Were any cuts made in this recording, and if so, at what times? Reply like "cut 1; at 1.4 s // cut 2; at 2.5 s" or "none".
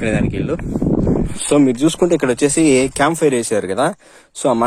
cut 1; at 1.2 s